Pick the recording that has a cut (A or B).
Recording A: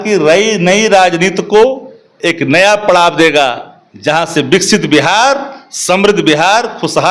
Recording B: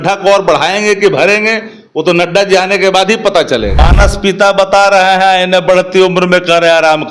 B